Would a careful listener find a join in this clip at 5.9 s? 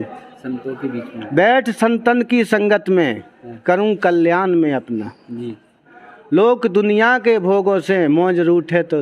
yes; 1 cut; at 5.9 s

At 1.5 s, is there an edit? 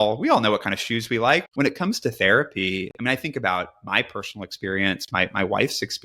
yes; 1 cut; at 1.5 s

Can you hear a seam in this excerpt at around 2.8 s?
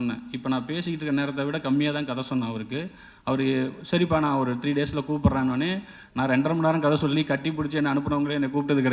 no; 0 cuts

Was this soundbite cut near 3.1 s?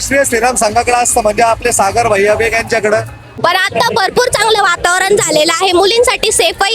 yes; 1 cut; at 3.1 s

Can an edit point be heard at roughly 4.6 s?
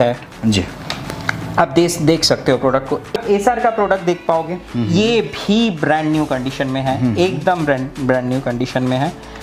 no; 1 cut; at 3.1 s

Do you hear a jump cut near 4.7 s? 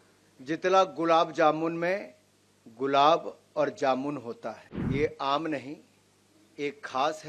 yes; 1 cut; at 4.7 s

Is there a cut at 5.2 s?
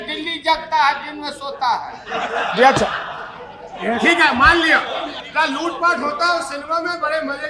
yes; 1 cut; at 5.2 s

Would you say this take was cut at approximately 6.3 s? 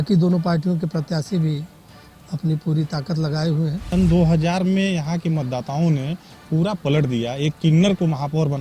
no; 1 cut; at 3.9 s

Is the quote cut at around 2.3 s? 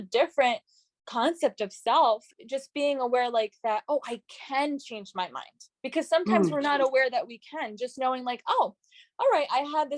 yes; 1 cut; at 2.3 s

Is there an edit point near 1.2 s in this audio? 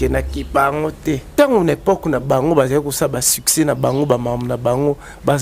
yes; 1 cut; at 1.2 s

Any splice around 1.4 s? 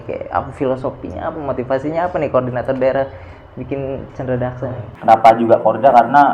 no; 1 cut; at 4.8 s

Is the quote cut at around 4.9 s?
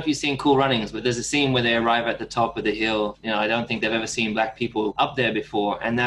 yes; 3 cuts; at 0.9 s, 3.2 s, 4.9 s

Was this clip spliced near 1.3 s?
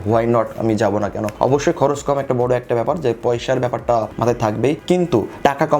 yes; 2 cuts; at 1.3 s, 4.1 s

